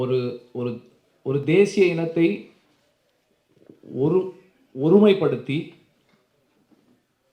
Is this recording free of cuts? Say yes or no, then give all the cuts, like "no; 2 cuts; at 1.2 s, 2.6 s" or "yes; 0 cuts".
yes; 0 cuts